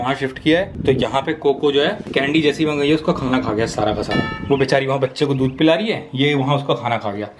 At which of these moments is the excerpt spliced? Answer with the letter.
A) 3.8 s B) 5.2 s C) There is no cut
C